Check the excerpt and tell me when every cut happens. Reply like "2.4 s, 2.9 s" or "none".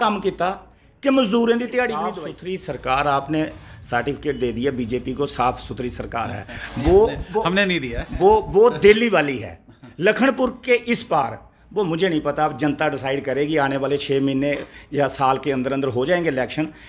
2.2 s

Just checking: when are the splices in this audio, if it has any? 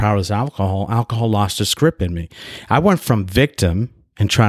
none

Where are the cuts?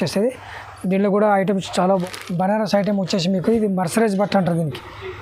2.0 s

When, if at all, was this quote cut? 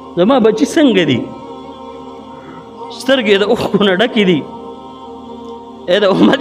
none

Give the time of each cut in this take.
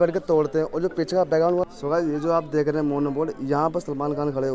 1.6 s

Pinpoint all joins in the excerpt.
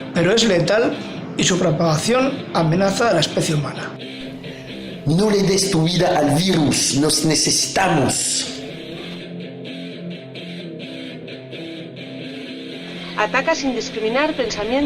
6.7 s

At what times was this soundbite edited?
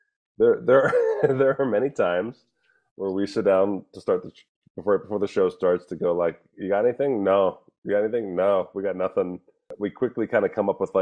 9.7 s

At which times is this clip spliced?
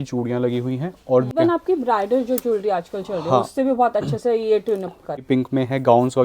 1.3 s, 5.2 s

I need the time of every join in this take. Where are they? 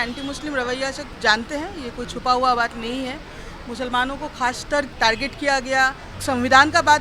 1.1 s, 4.9 s, 6.1 s

